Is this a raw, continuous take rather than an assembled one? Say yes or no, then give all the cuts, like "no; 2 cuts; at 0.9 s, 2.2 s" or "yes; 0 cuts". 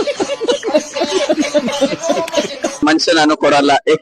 no; 1 cut; at 2.8 s